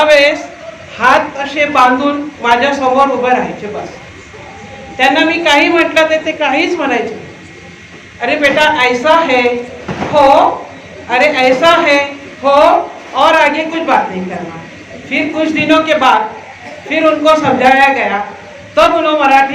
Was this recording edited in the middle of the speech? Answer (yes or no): no